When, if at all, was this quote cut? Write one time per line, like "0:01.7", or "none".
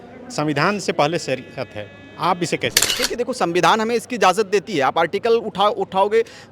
0:03.0

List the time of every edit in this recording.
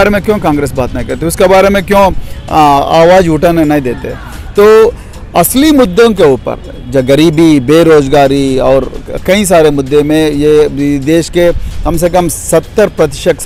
none

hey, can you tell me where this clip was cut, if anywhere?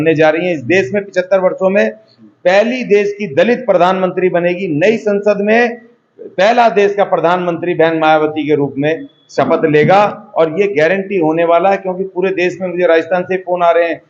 none

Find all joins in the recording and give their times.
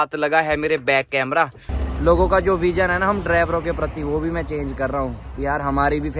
0:01.7

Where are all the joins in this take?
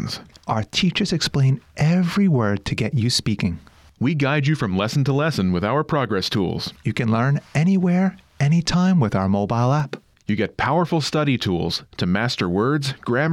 none

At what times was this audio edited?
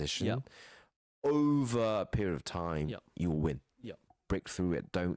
0:04.1

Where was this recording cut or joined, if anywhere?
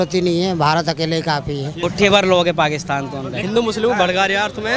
0:01.7
0:03.4

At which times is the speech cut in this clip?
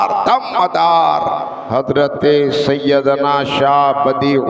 0:01.5

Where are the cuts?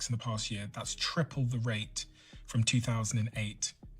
0:01.6

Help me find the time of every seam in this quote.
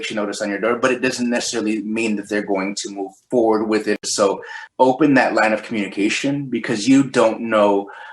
0:04.0

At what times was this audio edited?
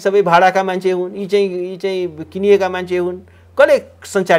none

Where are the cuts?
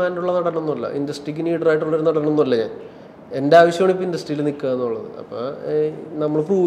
none

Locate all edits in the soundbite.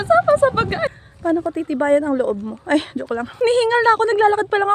0:00.9
0:03.4

